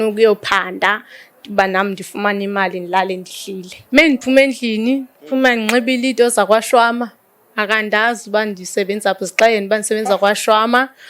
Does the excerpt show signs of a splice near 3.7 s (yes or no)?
yes